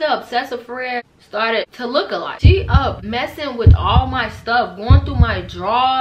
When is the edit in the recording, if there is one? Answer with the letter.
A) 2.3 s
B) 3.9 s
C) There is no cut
A